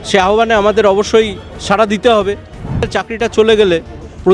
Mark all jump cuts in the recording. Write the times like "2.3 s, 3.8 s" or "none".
3.0 s